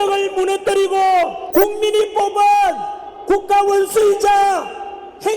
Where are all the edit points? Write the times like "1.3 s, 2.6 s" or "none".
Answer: 1.4 s